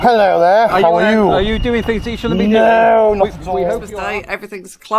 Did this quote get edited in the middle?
yes; 1 cut; at 3.9 s

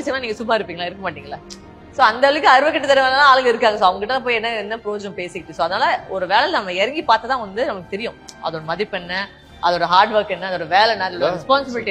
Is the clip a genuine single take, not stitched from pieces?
yes; 0 cuts

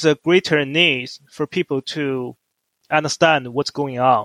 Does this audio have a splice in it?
no; 0 cuts

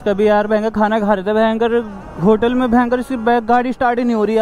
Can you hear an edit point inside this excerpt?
no; 0 cuts

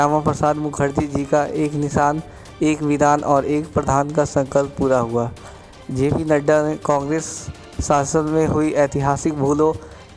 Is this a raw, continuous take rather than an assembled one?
yes; 0 cuts

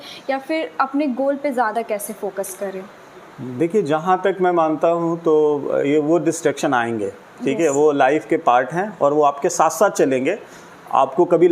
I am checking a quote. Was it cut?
no; 0 cuts

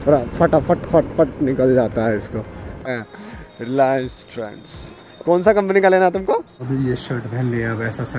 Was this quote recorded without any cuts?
no; 2 cuts; at 2.8 s, 6.5 s

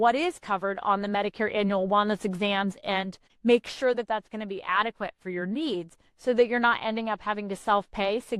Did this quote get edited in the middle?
yes; 1 cut; at 3.2 s

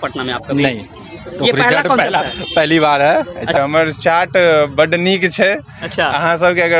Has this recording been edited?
yes; 1 cut; at 3.6 s

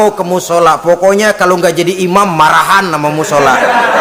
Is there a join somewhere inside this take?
no; 0 cuts

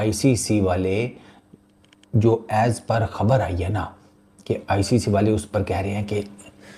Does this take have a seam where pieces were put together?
no; 0 cuts

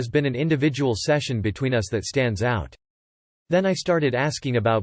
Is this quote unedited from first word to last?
yes; 0 cuts

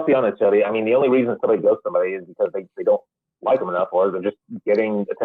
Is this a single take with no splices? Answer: yes; 0 cuts

